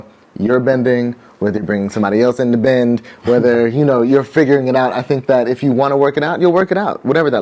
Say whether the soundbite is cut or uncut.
uncut